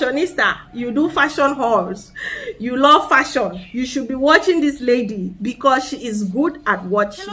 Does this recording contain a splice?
no; 0 cuts

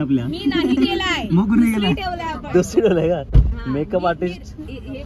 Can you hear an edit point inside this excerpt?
no; 0 cuts

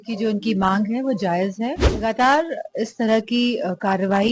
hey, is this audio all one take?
no; 1 cut; at 1.9 s

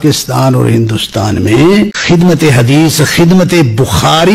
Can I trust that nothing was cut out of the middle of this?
no; 1 cut; at 2.0 s

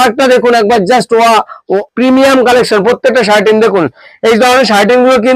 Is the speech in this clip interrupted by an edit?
yes; 1 cut; at 1.6 s

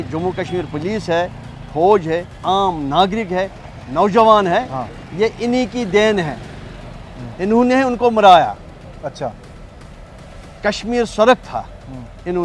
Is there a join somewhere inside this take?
no; 0 cuts

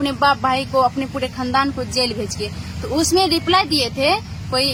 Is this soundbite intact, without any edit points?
yes; 0 cuts

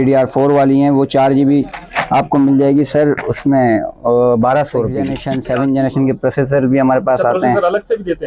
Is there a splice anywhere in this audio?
yes; 1 cut; at 5.2 s

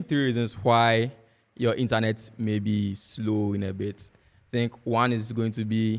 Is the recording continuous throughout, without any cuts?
yes; 0 cuts

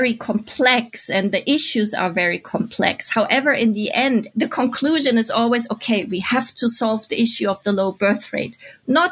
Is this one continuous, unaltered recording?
yes; 0 cuts

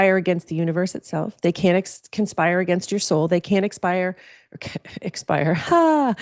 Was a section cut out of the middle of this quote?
no; 0 cuts

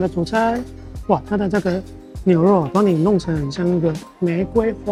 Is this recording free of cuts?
yes; 0 cuts

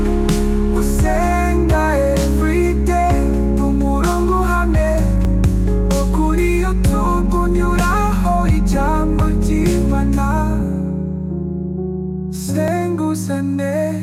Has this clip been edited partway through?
no; 0 cuts

